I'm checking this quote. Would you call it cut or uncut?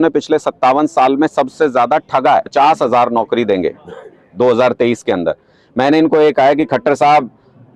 cut